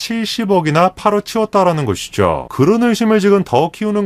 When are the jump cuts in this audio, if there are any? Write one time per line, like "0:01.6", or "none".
0:02.5